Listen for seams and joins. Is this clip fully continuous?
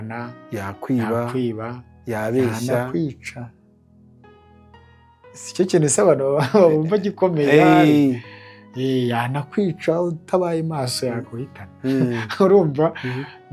yes; 0 cuts

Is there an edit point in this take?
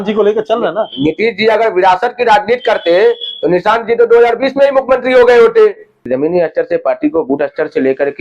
yes; 1 cut; at 6.1 s

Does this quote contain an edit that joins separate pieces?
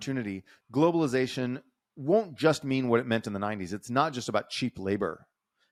no; 0 cuts

